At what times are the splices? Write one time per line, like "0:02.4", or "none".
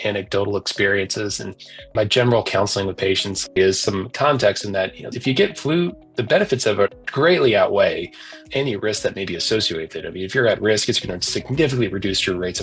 0:03.5
0:07.0